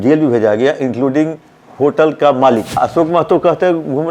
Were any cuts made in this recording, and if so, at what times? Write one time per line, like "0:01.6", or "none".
0:02.7